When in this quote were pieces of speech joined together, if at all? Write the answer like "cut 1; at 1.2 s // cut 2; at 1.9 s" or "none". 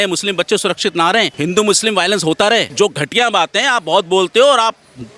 cut 1; at 1.3 s // cut 2; at 2.7 s